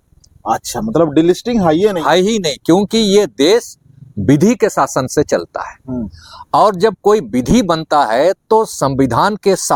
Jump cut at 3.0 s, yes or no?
no